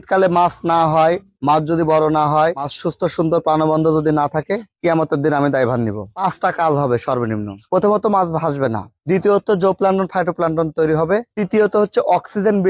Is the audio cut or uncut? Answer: uncut